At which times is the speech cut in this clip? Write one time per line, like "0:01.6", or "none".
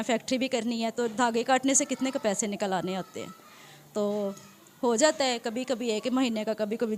none